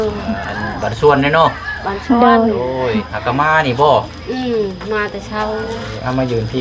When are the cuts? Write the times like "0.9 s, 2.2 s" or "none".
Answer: none